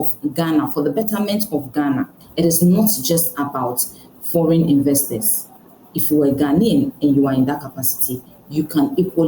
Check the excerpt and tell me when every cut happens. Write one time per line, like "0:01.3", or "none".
0:02.2